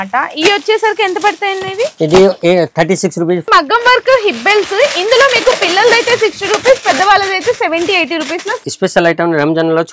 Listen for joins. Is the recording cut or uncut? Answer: cut